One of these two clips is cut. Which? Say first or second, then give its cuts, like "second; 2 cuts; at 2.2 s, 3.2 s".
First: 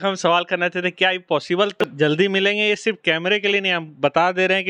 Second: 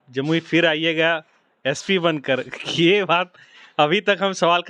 first; 1 cut; at 1.8 s